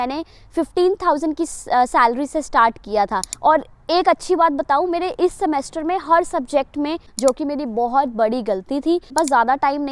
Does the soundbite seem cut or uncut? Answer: cut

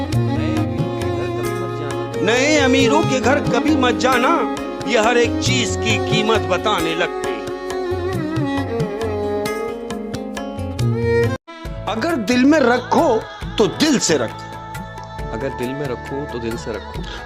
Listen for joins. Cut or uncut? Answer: uncut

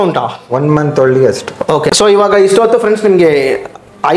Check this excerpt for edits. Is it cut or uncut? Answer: cut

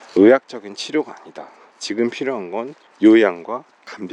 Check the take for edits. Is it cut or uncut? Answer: cut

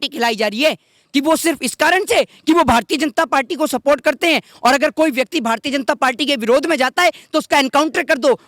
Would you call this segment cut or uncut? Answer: uncut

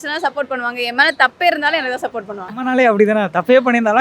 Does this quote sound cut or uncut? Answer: uncut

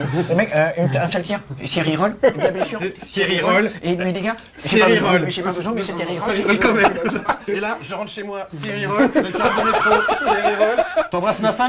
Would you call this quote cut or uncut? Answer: uncut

